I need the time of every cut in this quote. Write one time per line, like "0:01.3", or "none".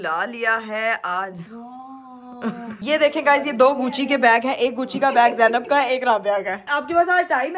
0:02.8
0:06.7

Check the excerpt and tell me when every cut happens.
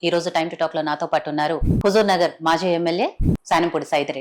0:01.7
0:03.3

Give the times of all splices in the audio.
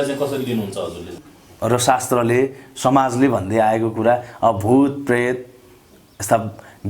0:01.1

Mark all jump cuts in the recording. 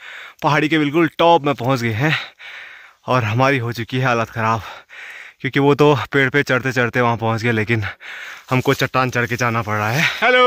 none

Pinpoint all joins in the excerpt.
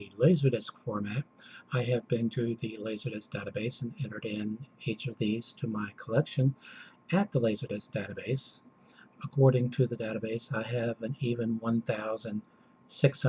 0:09.1

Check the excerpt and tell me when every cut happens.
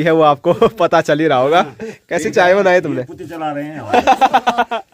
none

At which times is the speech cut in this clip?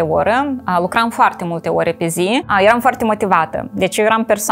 0:02.5

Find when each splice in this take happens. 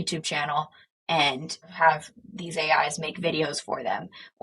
0:01.7

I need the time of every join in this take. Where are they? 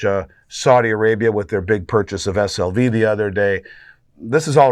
none

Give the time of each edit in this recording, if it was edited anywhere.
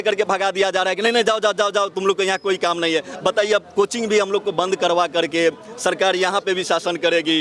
none

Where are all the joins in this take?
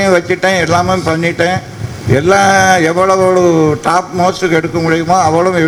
none

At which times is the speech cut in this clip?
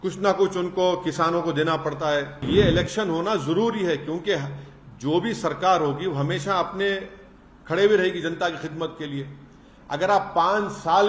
0:02.4

